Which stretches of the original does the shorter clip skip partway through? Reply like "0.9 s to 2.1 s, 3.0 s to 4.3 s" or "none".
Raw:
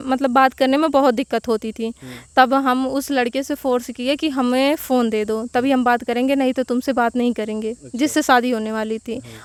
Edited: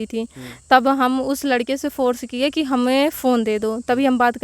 none